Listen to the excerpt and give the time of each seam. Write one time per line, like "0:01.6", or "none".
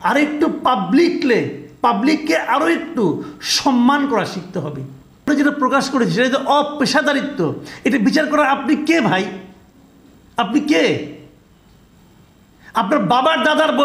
0:05.3